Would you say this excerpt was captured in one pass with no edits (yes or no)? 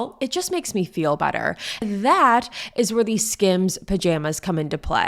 no